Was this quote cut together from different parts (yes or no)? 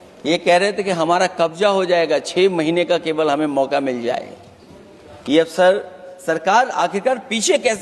no